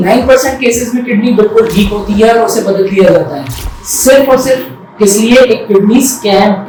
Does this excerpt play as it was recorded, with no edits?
yes; 0 cuts

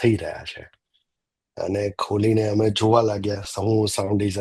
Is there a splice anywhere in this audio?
no; 0 cuts

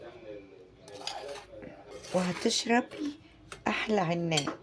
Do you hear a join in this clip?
yes; 1 cut; at 1.9 s

